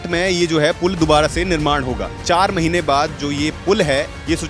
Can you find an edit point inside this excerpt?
yes; 1 cut; at 2.2 s

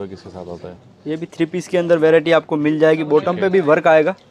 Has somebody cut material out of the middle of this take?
no; 0 cuts

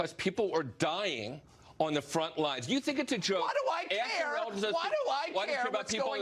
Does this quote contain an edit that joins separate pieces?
no; 0 cuts

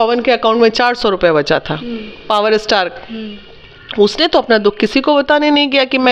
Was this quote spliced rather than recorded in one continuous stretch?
no; 0 cuts

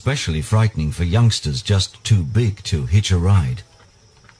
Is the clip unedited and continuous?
yes; 0 cuts

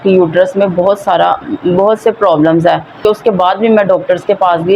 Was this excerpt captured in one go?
no; 1 cut; at 3.0 s

